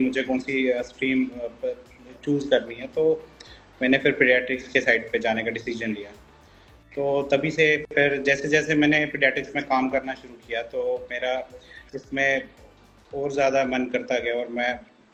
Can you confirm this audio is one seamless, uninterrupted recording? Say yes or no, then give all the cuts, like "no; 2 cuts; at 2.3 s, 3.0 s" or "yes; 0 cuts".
yes; 0 cuts